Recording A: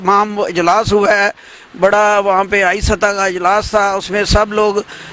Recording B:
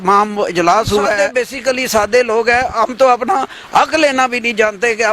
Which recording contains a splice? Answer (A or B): B